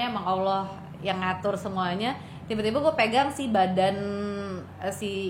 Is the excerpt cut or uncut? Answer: uncut